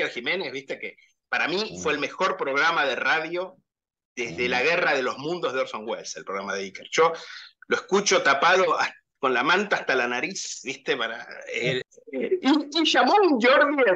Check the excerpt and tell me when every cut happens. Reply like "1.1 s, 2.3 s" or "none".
11.8 s